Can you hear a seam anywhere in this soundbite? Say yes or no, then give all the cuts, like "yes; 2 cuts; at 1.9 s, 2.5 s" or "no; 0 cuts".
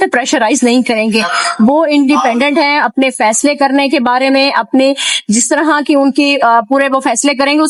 no; 0 cuts